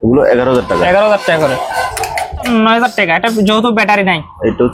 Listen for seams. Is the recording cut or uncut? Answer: cut